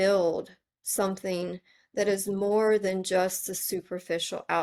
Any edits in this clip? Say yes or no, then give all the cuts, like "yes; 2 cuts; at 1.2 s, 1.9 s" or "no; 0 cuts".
no; 0 cuts